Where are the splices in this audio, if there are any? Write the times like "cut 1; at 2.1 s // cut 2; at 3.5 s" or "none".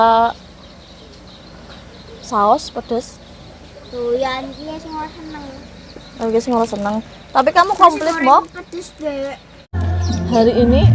cut 1; at 9.7 s